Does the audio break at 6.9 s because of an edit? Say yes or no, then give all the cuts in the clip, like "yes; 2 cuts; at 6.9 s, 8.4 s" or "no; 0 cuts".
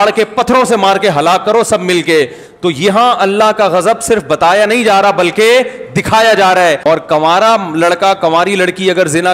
yes; 1 cut; at 6.9 s